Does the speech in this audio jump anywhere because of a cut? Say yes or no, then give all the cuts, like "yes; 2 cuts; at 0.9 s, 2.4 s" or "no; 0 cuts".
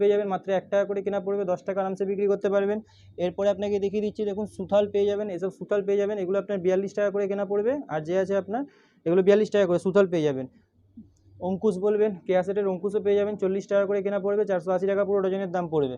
no; 0 cuts